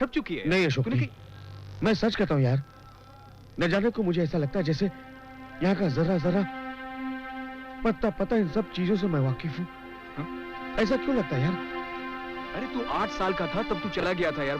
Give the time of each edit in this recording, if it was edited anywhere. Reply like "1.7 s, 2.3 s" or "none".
none